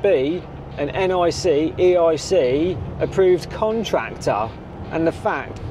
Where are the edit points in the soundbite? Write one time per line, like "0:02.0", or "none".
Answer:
none